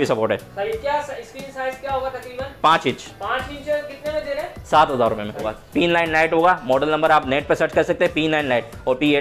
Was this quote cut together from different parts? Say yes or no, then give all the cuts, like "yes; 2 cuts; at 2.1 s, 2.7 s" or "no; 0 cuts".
yes; 1 cut; at 5.5 s